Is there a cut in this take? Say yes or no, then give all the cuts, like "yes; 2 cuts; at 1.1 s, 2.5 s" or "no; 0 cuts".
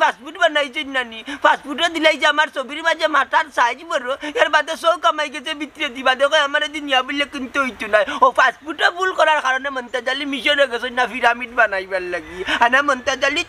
no; 0 cuts